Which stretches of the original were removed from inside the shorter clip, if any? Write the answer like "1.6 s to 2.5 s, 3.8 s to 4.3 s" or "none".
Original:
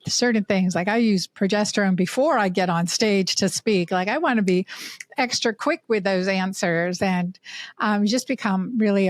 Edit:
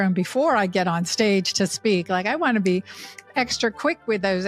none